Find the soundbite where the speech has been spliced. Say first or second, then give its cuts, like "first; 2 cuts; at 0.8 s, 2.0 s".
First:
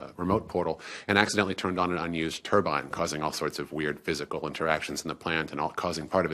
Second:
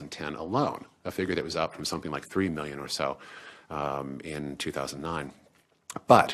first; 1 cut; at 5.3 s